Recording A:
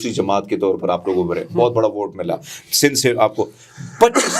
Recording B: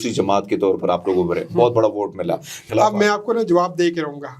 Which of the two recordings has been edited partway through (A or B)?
B